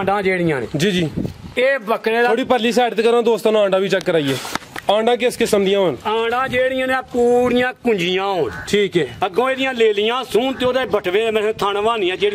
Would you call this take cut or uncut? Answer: uncut